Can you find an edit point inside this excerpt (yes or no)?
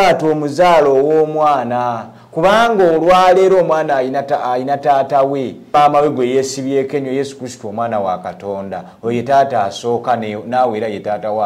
yes